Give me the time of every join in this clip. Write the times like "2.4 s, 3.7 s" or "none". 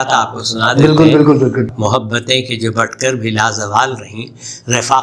1.7 s